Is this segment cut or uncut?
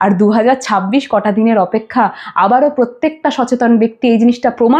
uncut